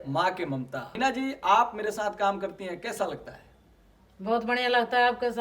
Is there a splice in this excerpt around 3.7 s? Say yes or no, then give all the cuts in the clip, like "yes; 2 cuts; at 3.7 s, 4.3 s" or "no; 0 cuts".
no; 1 cut; at 1.0 s